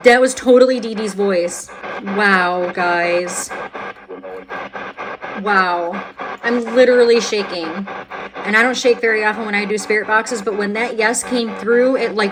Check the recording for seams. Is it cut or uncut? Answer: uncut